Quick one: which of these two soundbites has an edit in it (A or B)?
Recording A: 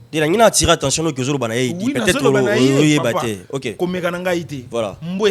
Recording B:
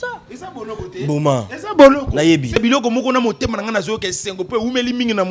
B